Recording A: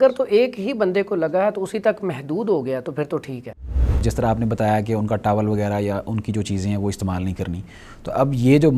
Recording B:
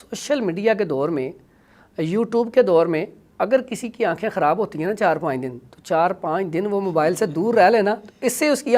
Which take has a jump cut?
A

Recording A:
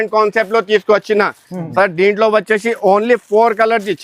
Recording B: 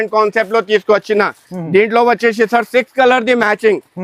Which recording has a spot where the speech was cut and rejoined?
A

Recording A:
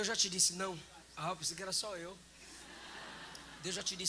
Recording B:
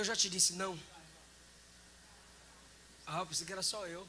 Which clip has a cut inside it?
A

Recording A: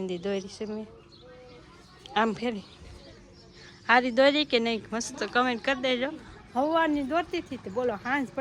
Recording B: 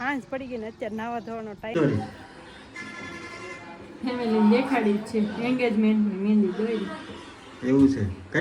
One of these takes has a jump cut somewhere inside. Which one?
B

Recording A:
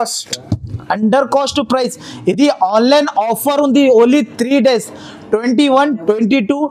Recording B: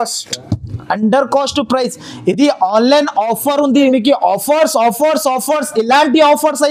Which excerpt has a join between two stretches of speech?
B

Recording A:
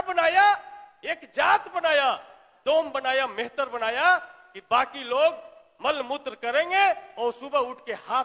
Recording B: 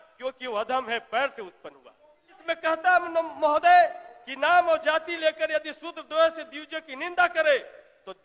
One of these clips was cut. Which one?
B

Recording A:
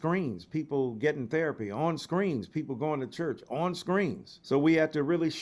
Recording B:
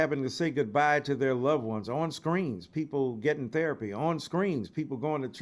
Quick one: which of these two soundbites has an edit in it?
A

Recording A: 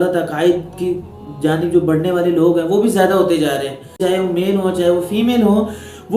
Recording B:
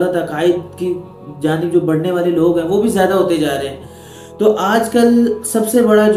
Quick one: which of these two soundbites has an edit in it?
A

